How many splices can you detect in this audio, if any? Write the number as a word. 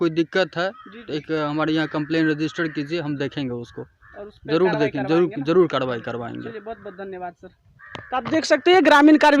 zero